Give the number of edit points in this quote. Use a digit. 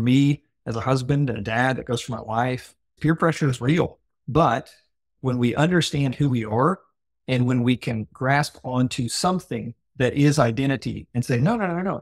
2